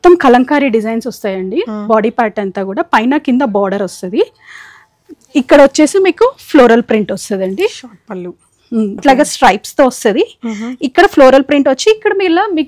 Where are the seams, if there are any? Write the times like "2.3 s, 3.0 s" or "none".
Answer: 9.0 s